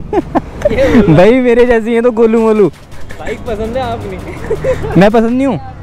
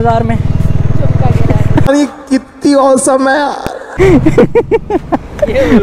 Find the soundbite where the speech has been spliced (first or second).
second